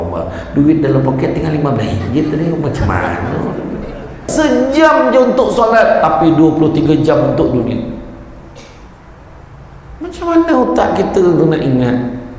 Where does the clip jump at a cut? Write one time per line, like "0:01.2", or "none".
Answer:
0:04.3